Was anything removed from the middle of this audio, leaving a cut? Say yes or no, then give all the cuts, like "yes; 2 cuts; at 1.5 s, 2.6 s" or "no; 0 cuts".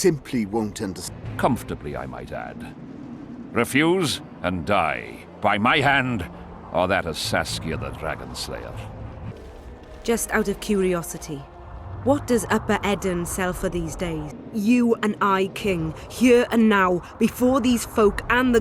yes; 3 cuts; at 1.0 s, 9.3 s, 14.3 s